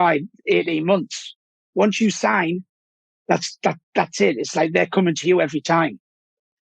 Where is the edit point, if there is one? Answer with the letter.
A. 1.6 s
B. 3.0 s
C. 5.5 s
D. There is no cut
A